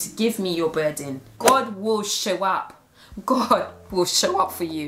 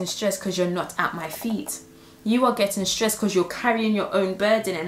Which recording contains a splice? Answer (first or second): first